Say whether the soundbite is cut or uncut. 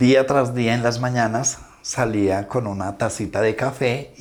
uncut